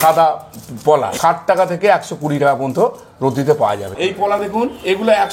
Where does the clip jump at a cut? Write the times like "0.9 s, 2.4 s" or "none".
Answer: 1.1 s, 3.9 s